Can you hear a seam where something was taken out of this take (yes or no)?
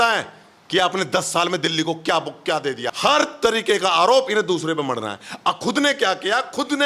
yes